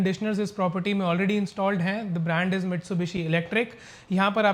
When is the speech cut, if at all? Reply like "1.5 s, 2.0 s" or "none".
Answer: none